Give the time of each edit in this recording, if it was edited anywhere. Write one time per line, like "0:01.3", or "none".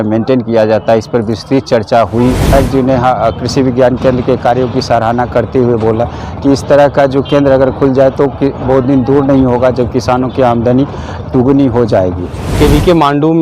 0:02.4
0:12.6